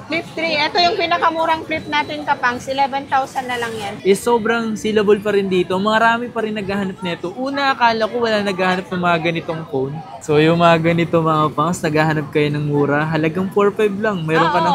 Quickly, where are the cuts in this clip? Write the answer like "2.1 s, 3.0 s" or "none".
3.9 s, 10.1 s